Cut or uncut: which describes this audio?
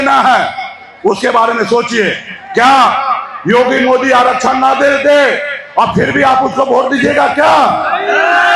uncut